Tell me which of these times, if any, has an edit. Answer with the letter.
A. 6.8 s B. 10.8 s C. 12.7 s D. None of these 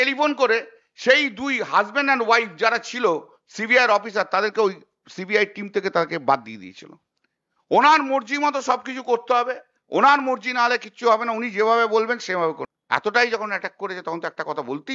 C